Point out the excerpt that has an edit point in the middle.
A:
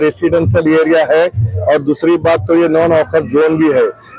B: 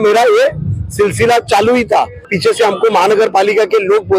B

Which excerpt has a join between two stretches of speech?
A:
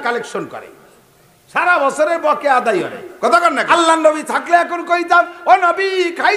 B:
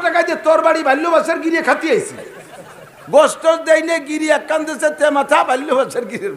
A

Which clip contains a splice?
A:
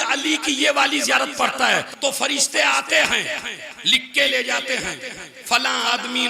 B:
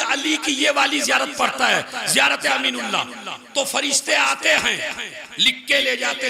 A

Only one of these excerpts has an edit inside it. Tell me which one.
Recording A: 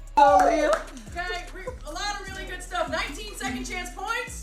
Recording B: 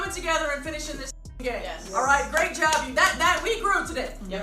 B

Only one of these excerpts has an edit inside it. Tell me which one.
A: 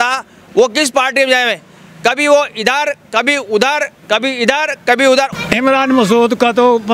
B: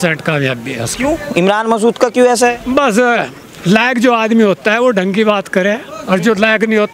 A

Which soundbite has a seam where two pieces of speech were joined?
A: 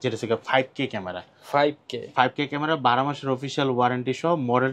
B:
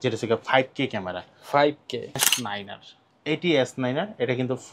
B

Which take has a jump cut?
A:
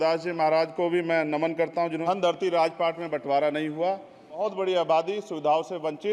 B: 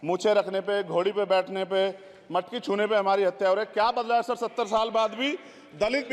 A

